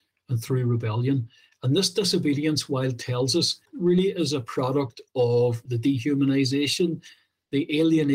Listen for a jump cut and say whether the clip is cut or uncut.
cut